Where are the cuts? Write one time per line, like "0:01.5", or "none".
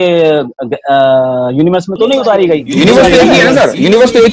0:02.7